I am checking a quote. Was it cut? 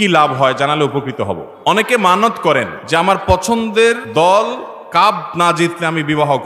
yes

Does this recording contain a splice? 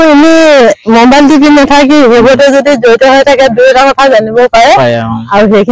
no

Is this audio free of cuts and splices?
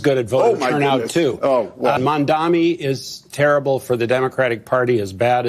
no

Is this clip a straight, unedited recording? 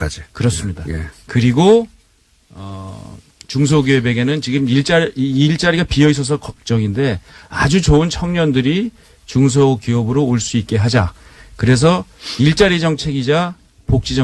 no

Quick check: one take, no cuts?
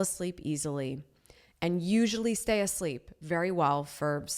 yes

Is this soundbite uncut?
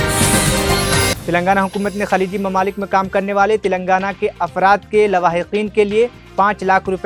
no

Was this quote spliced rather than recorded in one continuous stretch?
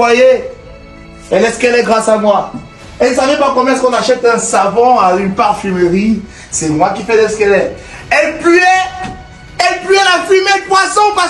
no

